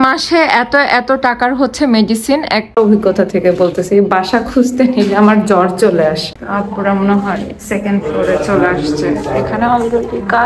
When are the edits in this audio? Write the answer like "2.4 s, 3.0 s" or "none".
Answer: 2.8 s, 6.3 s